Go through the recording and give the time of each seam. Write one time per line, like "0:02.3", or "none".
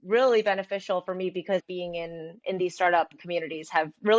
0:01.6